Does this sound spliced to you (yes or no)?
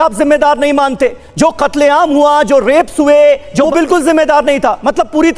yes